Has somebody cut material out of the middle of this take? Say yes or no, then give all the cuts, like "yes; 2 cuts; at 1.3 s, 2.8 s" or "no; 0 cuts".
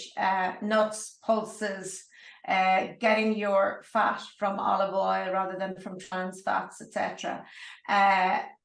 no; 0 cuts